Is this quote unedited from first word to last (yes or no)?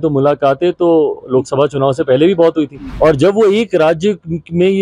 no